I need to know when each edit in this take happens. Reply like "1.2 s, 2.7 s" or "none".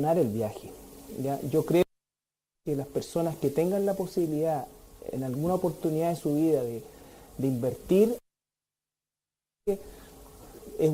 4.6 s